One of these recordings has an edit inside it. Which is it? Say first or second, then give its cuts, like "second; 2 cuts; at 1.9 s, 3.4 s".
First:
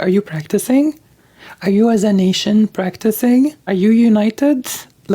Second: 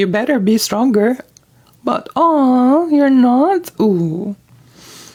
first; 1 cut; at 3.6 s